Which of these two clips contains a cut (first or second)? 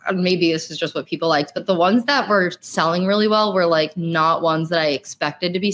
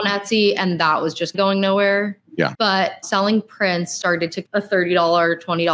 second